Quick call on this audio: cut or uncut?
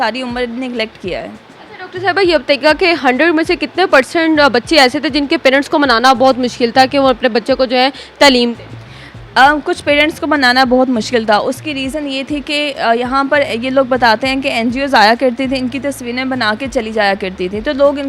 uncut